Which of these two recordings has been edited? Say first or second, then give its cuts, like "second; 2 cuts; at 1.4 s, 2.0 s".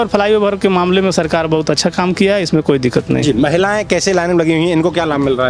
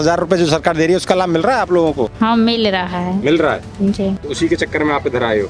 second; 2 cuts; at 2.1 s, 4.3 s